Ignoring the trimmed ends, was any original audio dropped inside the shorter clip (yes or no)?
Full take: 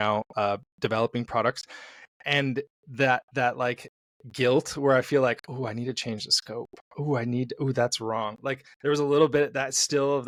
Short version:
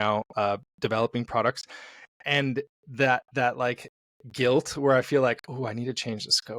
no